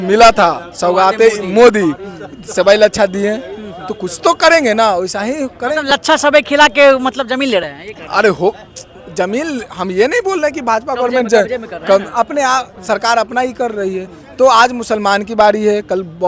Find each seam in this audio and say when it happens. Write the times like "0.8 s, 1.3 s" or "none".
none